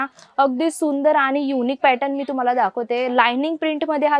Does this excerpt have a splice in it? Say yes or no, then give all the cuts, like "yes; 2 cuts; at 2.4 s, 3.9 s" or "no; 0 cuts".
no; 0 cuts